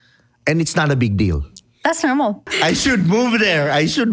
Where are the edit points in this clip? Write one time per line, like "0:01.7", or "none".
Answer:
0:02.5